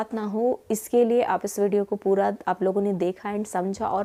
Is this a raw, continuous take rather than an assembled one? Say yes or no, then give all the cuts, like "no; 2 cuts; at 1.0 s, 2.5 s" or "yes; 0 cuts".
yes; 0 cuts